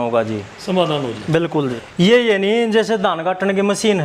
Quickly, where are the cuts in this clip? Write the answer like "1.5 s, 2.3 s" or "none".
1.8 s